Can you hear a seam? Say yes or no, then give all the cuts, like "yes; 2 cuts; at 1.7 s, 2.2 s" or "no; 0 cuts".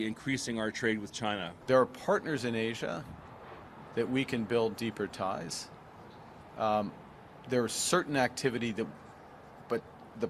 yes; 1 cut; at 1.5 s